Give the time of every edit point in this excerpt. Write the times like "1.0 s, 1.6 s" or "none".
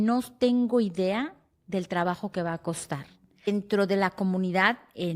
3.5 s